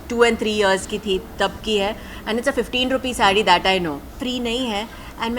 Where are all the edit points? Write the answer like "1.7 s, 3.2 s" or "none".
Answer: 4.2 s